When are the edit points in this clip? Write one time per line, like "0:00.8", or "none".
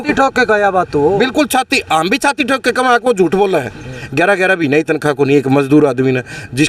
0:04.0

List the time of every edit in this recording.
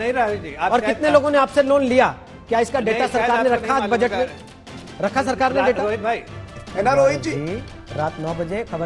0:06.7

